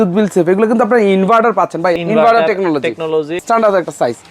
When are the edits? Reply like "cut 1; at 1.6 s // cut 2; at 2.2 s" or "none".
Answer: cut 1; at 1.9 s // cut 2; at 3.4 s